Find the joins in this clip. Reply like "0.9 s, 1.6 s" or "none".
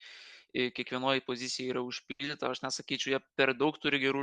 none